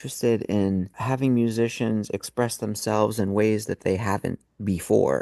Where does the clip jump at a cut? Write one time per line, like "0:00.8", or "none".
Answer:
0:01.0